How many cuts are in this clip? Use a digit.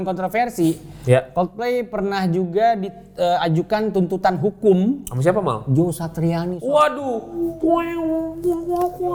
0